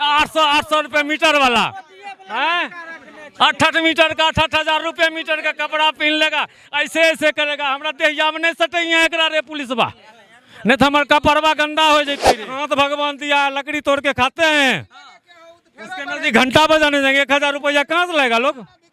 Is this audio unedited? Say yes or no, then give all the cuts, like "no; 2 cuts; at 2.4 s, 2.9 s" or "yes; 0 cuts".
no; 1 cut; at 12.4 s